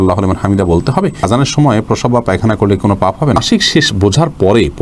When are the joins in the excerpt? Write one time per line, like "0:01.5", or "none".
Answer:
0:01.3
0:03.4